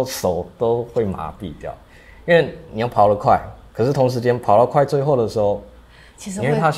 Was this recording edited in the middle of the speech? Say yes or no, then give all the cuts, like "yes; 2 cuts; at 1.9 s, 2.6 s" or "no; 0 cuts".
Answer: no; 0 cuts